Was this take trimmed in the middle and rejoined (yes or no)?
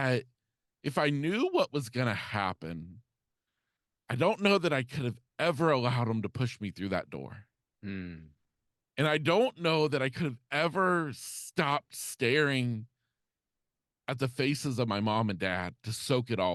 no